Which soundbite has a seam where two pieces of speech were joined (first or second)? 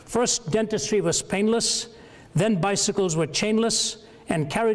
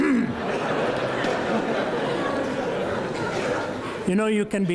first